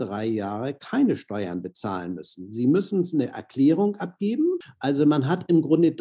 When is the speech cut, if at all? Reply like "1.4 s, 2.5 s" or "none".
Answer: 4.7 s